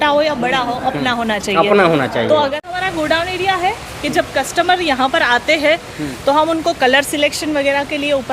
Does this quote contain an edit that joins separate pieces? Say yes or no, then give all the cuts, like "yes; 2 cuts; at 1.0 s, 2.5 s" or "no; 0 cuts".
yes; 1 cut; at 2.6 s